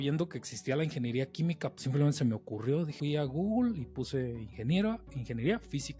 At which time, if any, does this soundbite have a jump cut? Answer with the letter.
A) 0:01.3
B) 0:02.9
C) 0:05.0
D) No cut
B